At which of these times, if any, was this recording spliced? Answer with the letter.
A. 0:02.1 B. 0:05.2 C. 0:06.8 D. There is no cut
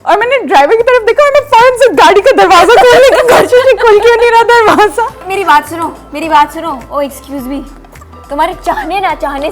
B